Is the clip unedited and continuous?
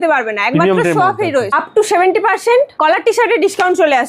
no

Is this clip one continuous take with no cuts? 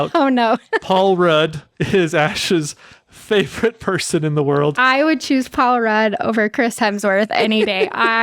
yes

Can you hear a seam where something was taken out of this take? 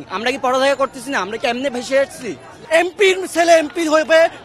yes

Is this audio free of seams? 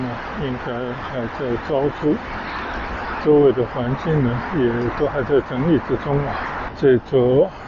no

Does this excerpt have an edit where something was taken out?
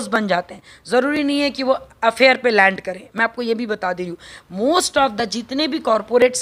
no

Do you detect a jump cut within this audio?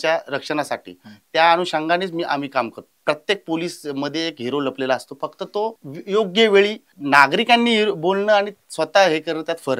yes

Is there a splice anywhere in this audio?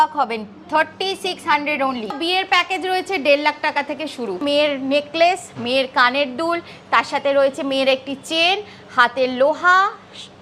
yes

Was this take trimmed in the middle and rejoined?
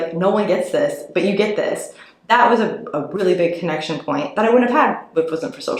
no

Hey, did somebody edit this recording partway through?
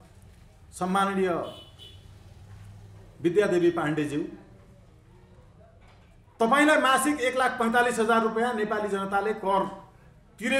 no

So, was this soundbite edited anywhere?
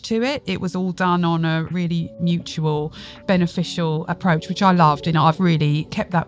yes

